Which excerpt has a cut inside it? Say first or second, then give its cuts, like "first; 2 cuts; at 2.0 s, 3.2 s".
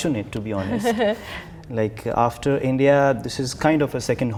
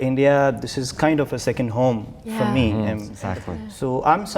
second; 1 cut; at 3.1 s